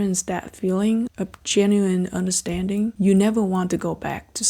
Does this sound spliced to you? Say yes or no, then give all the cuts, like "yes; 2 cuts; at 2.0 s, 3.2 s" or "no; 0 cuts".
yes; 1 cut; at 2.9 s